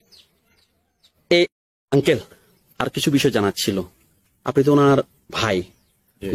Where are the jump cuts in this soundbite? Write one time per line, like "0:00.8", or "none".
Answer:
0:01.5